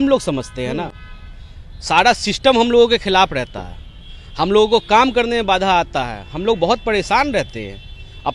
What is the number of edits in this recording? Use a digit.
0